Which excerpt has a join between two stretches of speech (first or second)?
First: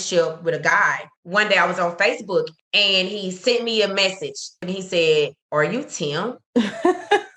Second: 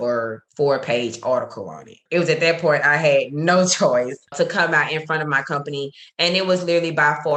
first